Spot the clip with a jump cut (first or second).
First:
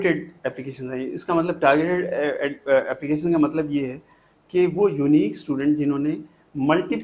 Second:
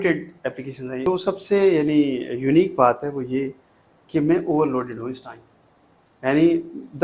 second